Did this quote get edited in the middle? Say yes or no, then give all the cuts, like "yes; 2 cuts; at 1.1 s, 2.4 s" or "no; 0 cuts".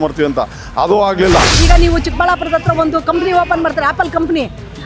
yes; 1 cut; at 1.5 s